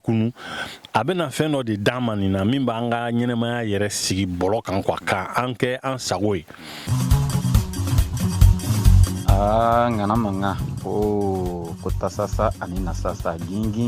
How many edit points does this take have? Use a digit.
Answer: 1